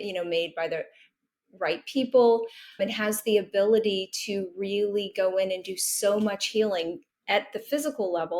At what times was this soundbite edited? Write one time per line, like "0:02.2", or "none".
0:02.8